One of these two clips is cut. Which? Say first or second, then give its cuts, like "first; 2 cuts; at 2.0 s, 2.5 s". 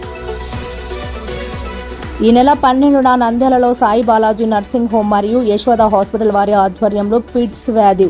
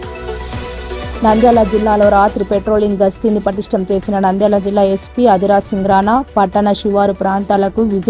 second; 1 cut; at 1.0 s